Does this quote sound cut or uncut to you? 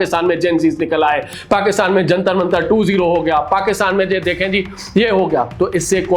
uncut